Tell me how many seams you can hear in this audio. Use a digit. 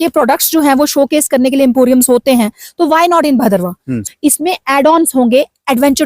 1